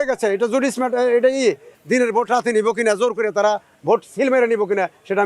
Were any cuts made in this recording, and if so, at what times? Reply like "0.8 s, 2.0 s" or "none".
1.7 s